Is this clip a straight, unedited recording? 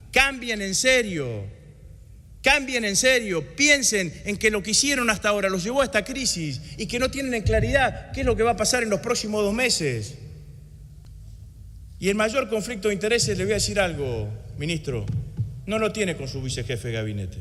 no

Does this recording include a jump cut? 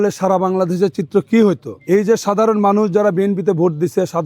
yes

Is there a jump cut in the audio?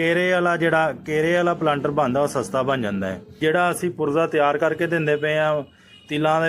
yes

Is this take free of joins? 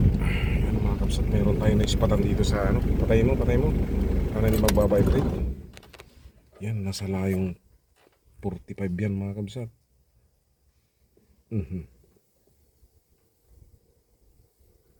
yes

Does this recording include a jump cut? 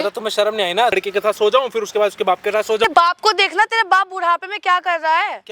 yes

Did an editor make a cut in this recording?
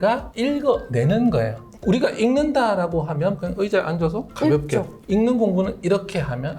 yes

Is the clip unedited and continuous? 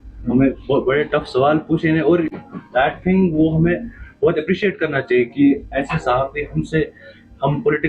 yes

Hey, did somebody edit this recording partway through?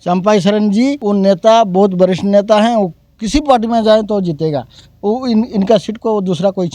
no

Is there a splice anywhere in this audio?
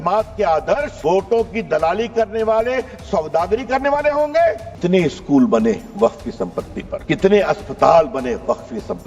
yes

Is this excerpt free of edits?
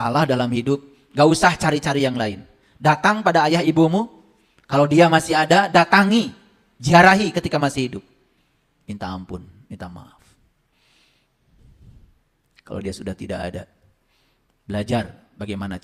yes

